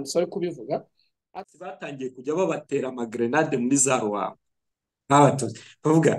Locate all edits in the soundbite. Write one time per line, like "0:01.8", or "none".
0:01.2